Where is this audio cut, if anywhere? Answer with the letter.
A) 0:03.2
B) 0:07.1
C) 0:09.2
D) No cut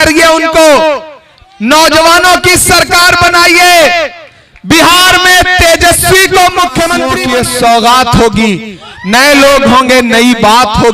B